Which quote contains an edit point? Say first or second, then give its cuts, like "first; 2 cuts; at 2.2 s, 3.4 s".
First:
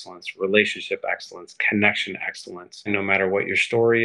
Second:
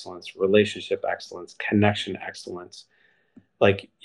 first; 1 cut; at 2.9 s